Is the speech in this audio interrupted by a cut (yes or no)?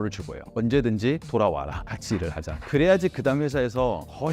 yes